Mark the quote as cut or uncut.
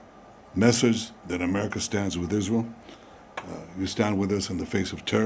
uncut